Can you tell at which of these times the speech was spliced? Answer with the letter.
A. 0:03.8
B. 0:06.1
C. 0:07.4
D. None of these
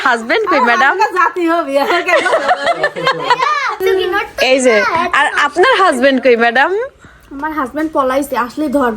A